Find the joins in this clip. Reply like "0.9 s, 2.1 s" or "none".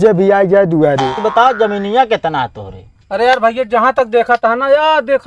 1.2 s